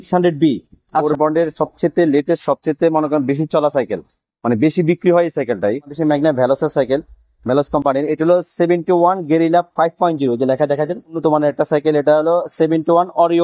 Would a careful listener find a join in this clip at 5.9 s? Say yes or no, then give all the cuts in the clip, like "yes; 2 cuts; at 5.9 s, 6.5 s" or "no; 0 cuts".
yes; 3 cuts; at 1.0 s, 5.9 s, 11.2 s